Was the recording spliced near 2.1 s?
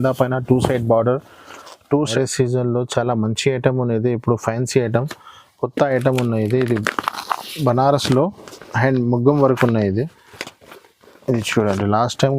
yes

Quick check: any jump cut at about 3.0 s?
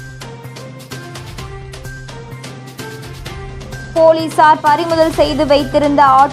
no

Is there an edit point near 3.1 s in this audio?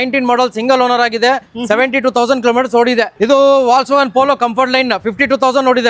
yes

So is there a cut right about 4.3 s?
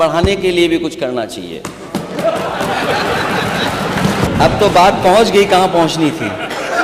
yes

